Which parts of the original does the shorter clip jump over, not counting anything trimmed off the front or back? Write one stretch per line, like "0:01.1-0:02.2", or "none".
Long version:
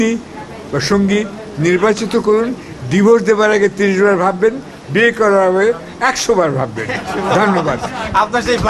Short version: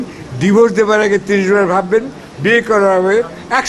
none